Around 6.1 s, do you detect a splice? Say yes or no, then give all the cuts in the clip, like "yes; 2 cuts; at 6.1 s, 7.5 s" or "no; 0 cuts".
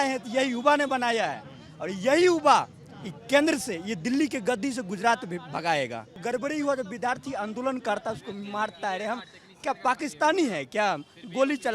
yes; 1 cut; at 6.1 s